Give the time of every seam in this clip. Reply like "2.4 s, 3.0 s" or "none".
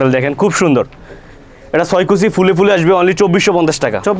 none